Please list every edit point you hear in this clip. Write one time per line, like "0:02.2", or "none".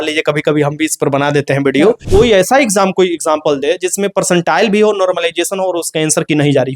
0:02.0